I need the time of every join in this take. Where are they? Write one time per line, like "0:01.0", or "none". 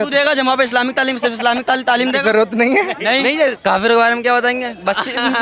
0:03.6